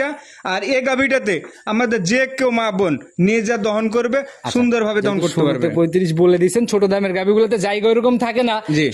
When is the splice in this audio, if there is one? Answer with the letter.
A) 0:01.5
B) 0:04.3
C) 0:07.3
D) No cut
D